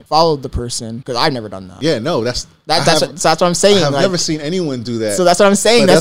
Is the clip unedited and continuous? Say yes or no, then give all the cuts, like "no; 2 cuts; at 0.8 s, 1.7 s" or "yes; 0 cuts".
no; 2 cuts; at 1.0 s, 1.7 s